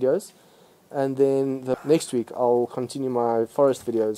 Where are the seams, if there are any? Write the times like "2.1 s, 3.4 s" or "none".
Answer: 1.7 s

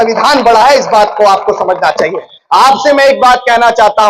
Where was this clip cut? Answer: 2.4 s

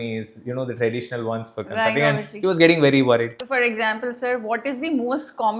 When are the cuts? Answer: 3.4 s

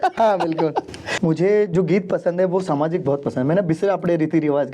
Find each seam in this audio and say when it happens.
1.0 s

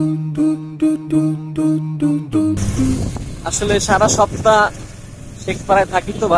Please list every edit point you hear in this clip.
3.1 s

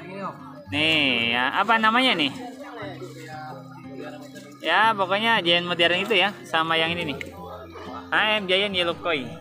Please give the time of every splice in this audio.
none

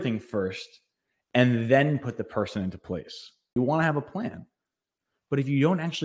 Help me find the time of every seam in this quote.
3.5 s

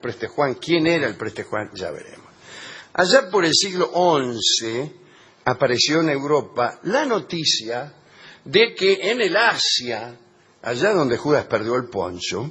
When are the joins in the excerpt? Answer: none

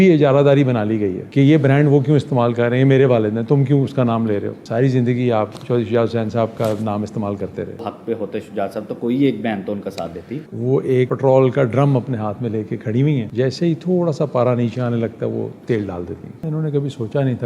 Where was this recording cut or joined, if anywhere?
7.8 s, 10.4 s, 16.5 s

